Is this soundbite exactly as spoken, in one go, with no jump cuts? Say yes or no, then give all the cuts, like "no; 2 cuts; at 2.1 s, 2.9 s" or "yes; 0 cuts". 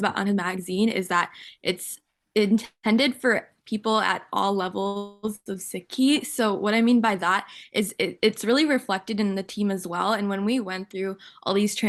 yes; 0 cuts